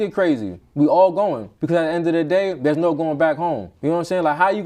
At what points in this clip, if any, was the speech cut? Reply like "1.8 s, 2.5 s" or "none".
1.5 s, 3.7 s